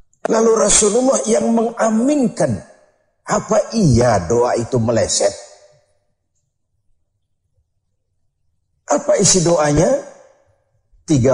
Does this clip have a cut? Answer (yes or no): no